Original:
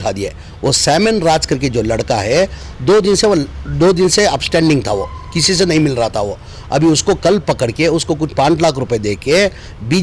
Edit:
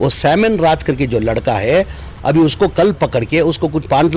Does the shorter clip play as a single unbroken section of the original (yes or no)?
no